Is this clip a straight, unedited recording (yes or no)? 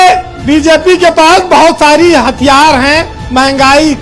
yes